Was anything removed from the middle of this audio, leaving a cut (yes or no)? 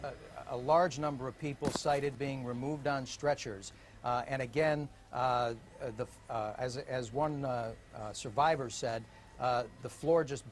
yes